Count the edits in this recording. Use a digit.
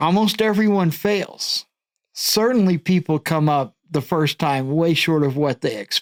0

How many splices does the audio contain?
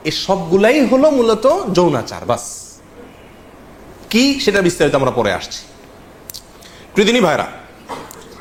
0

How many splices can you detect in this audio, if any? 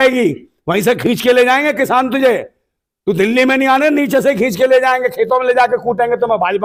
0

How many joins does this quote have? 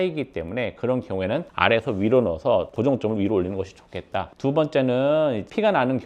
0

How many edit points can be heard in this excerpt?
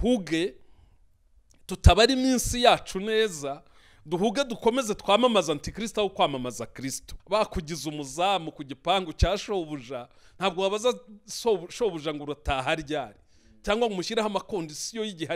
1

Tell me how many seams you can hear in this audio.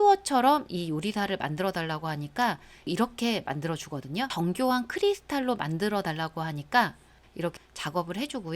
3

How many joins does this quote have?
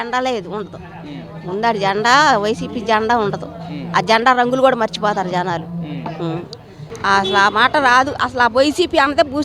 1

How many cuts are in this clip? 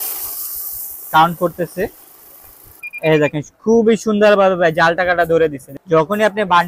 1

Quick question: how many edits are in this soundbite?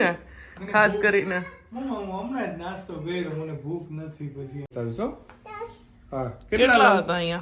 1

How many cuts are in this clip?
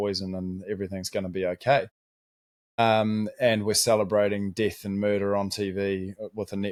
0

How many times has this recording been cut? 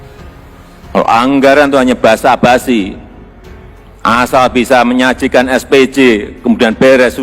1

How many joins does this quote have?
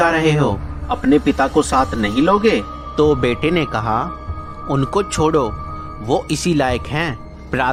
0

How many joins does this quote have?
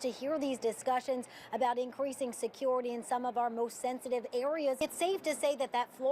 1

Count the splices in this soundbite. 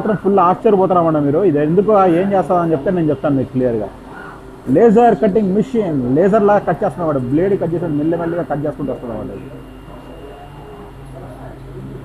0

